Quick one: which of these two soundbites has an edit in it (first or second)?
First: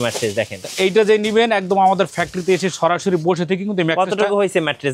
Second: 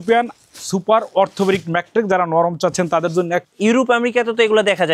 second